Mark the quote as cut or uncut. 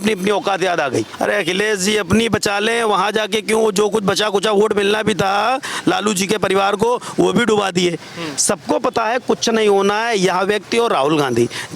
cut